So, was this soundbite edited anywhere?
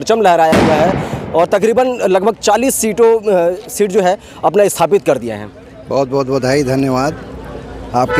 no; 0 cuts

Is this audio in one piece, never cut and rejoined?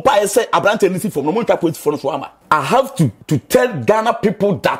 no; 2 cuts; at 2.3 s, 3.2 s

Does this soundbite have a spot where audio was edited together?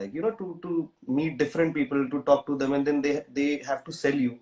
no; 0 cuts

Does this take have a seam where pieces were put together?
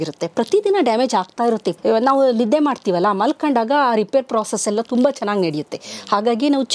yes; 1 cut; at 1.7 s

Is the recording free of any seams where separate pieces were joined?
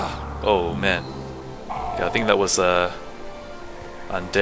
yes; 0 cuts

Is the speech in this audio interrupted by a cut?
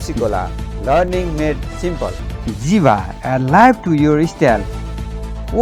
no; 0 cuts

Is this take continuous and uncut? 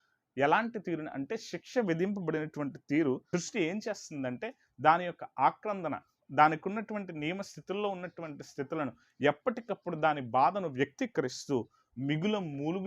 no; 1 cut; at 3.2 s

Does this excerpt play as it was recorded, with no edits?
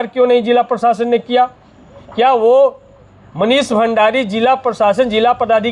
yes; 0 cuts

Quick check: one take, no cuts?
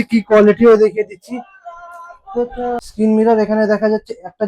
no; 1 cut; at 2.8 s

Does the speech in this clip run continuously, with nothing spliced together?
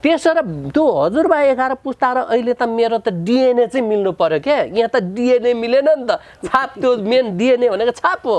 yes; 0 cuts

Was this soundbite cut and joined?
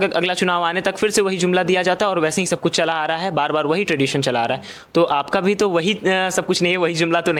no; 0 cuts

